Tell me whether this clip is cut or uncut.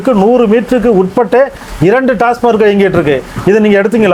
uncut